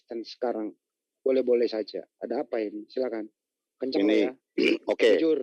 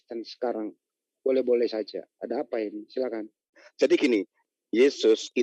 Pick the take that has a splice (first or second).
second